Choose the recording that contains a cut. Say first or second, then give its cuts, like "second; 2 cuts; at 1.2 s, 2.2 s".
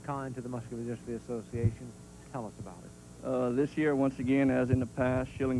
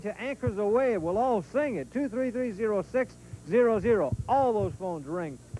second; 1 cut; at 2.8 s